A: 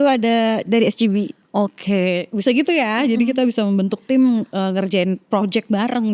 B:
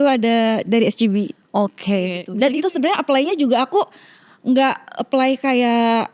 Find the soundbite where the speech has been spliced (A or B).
B